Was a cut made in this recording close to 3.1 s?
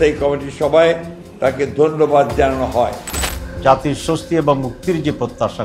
yes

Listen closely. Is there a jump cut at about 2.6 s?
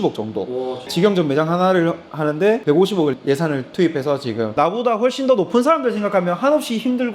yes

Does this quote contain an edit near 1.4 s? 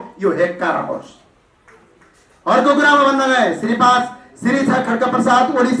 no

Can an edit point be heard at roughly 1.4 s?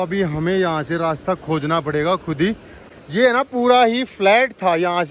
no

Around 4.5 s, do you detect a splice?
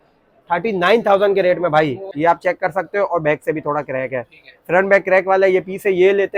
no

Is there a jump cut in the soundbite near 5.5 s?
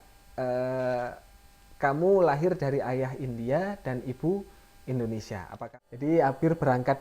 yes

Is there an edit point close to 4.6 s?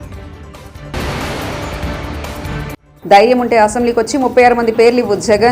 no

